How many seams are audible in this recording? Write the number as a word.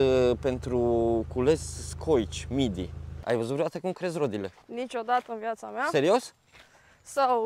one